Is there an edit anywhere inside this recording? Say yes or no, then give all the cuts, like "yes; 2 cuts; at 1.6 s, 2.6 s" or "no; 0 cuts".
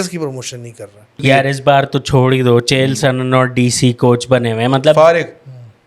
yes; 1 cut; at 1.2 s